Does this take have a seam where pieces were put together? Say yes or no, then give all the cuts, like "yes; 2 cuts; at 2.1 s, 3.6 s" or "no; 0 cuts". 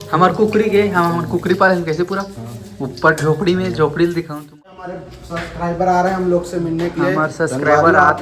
yes; 1 cut; at 4.6 s